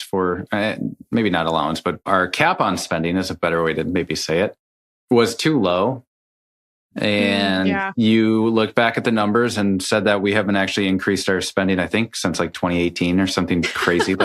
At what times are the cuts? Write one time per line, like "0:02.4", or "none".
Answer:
0:02.0